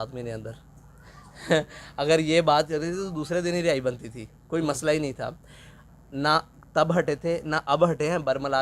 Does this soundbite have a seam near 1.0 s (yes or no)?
no